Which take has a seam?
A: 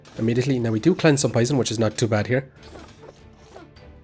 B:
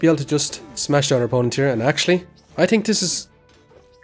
B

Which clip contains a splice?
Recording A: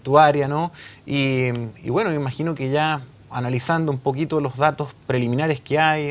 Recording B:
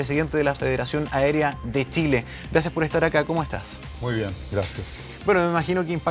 A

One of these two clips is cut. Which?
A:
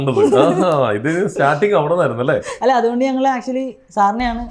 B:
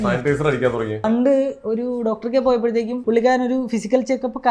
B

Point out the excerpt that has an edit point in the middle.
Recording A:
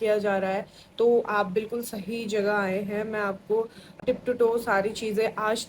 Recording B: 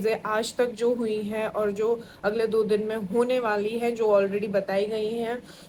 A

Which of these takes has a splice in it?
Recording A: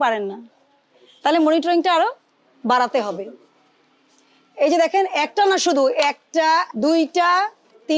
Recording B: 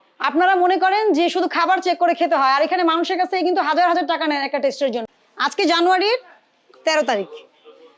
B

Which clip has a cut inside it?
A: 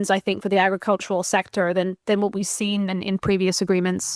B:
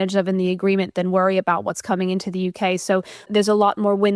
B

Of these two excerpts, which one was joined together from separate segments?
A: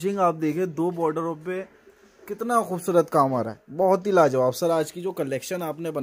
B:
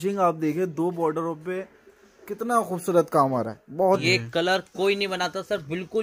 B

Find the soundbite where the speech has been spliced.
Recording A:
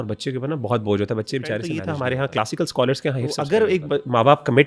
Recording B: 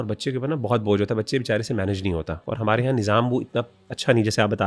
A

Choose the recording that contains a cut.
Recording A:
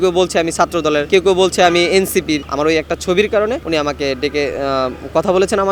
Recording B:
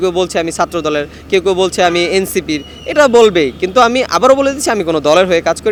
A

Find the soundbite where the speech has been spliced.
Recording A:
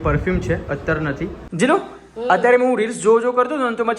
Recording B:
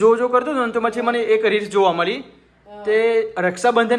A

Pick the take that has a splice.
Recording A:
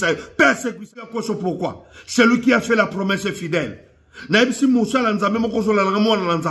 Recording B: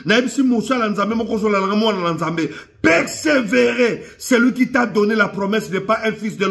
A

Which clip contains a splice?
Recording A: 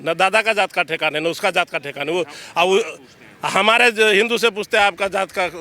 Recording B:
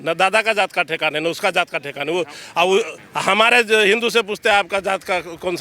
B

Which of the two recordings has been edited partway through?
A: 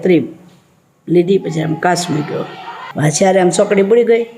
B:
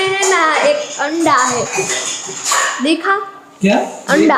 A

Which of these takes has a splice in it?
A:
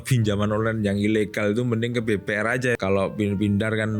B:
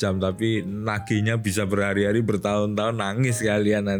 A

